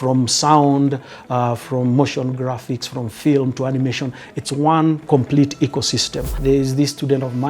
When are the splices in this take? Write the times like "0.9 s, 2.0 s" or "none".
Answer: 6.4 s